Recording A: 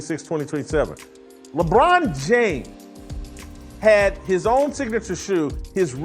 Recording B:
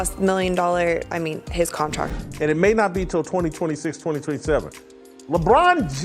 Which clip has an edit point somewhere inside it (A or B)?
B